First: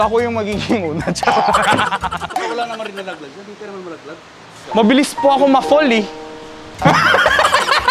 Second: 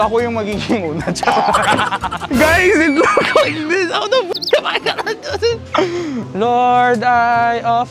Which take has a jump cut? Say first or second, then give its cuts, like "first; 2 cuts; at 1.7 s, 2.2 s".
second; 2 cuts; at 2.2 s, 6.3 s